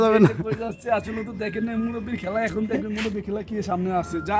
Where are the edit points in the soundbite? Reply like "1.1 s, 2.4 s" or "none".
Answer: none